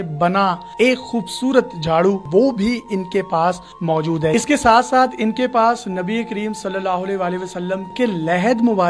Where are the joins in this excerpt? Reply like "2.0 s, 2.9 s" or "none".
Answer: 2.2 s, 4.3 s, 7.9 s